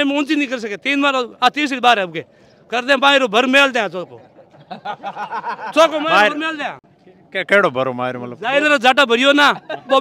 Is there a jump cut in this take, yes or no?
no